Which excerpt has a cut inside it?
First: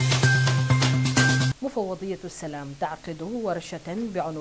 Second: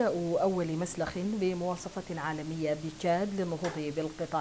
first; 1 cut; at 1.5 s

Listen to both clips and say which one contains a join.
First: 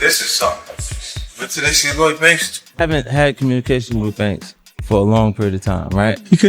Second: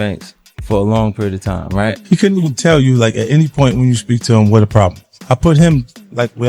first; 1 cut; at 2.8 s

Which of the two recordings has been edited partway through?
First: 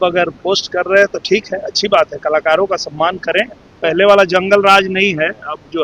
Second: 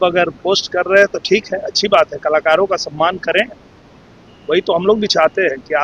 first; 1 cut; at 3.8 s

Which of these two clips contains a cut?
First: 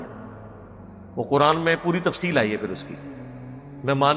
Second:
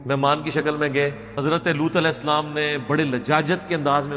second; 1 cut; at 1.4 s

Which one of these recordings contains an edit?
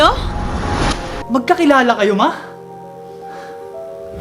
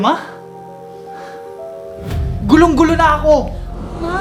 first; 1 cut; at 1.1 s

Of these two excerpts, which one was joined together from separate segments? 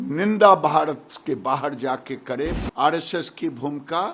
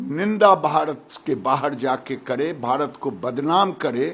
first; 1 cut; at 2.6 s

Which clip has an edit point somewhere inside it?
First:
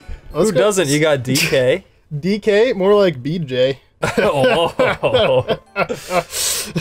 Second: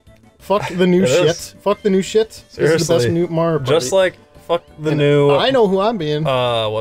second; 1 cut; at 3.9 s

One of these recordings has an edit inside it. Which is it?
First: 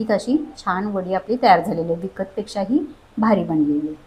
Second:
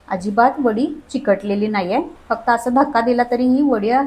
second; 1 cut; at 2.2 s

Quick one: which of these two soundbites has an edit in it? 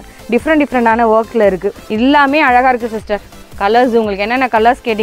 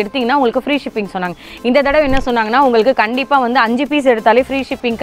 first; 1 cut; at 1.8 s

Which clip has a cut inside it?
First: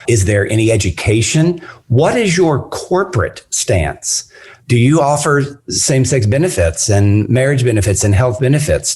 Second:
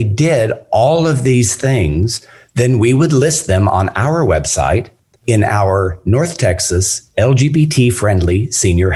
first; 1 cut; at 4.5 s

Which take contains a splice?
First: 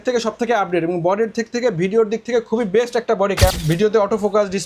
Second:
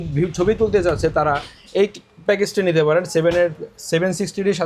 first; 1 cut; at 3.6 s

